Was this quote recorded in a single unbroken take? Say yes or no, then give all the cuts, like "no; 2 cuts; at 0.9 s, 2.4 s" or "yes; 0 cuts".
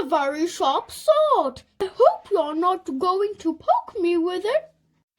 no; 1 cut; at 1.8 s